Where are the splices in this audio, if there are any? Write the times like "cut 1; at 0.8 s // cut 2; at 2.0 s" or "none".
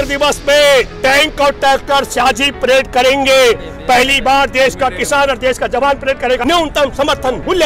cut 1; at 0.9 s // cut 2; at 6.4 s

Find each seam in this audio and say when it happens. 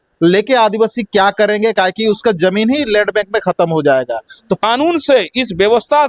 cut 1; at 4.6 s

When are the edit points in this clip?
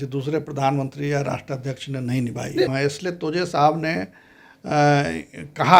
cut 1; at 2.7 s

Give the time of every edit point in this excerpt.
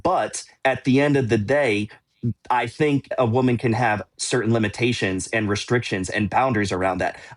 cut 1; at 3.1 s

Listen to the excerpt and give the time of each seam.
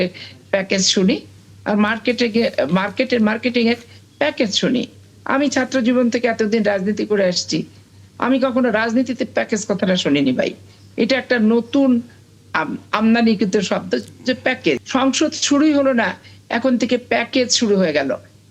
cut 1; at 14.8 s

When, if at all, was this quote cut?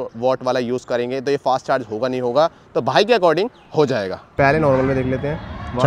none

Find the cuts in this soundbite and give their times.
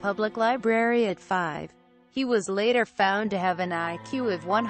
none

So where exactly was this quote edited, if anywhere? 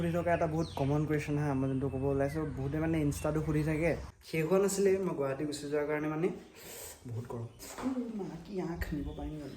cut 1; at 4.1 s

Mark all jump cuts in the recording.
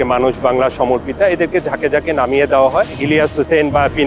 cut 1; at 3.0 s

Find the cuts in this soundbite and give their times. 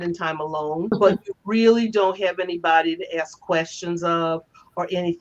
cut 1; at 0.9 s

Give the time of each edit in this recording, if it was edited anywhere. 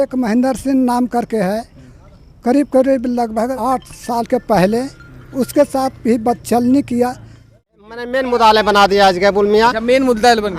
cut 1; at 3.5 s // cut 2; at 7.7 s

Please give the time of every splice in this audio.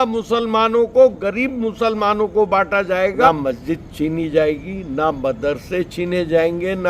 cut 1; at 3.3 s

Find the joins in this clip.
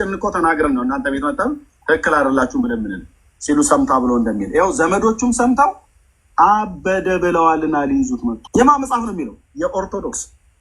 cut 1; at 8.4 s

